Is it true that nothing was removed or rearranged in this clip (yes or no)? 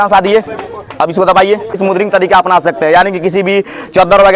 no